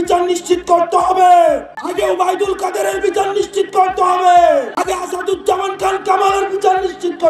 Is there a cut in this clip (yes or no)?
yes